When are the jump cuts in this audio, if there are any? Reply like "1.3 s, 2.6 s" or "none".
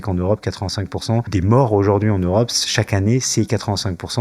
1.3 s